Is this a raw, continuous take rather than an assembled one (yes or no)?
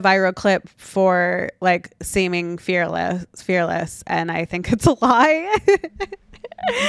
yes